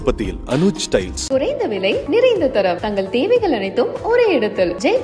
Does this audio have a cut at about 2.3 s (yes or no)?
no